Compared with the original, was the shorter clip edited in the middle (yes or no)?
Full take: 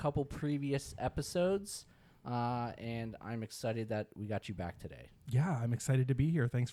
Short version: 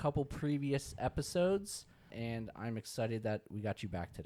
yes